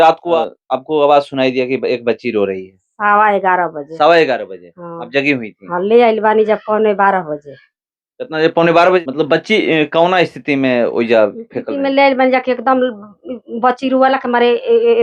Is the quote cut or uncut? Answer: cut